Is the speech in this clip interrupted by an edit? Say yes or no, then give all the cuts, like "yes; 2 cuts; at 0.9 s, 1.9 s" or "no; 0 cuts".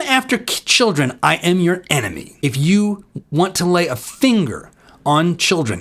yes; 1 cut; at 2.2 s